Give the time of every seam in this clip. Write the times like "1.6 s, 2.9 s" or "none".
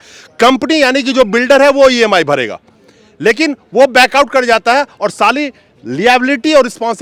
none